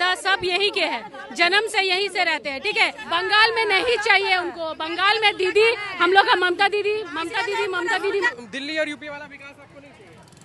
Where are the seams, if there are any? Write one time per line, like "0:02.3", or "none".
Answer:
0:03.0
0:08.3

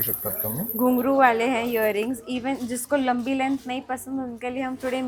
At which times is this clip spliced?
none

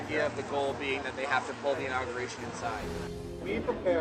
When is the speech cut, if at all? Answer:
0:03.1

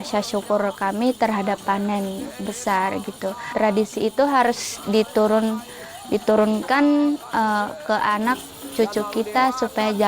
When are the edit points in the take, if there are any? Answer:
0:03.5

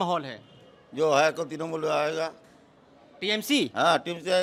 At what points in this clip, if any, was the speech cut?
none

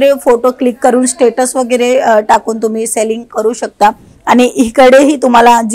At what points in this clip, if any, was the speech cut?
0:04.1

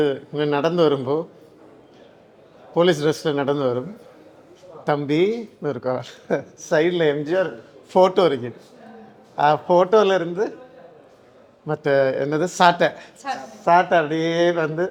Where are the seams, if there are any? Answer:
none

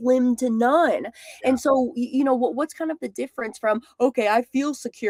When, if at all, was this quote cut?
none

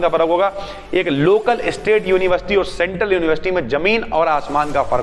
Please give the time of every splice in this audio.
none

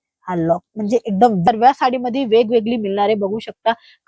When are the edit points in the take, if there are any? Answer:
0:01.4

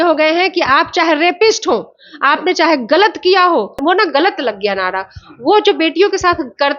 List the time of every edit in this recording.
0:03.8

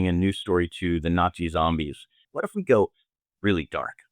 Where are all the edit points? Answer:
0:02.3

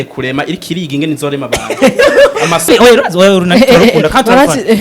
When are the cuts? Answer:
0:02.7

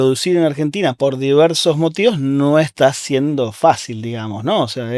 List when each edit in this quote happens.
0:01.0
0:02.7

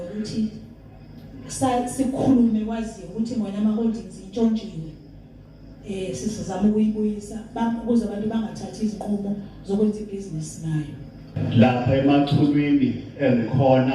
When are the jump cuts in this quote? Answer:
0:11.4

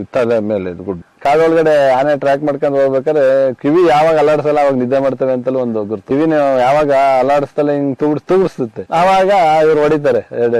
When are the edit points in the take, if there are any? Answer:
0:01.1

